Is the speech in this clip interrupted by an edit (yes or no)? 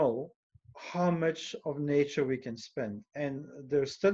no